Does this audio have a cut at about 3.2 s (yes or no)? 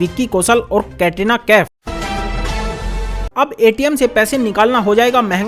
no